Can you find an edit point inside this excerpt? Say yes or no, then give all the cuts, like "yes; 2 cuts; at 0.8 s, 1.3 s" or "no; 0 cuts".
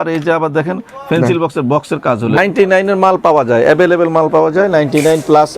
yes; 1 cut; at 2.4 s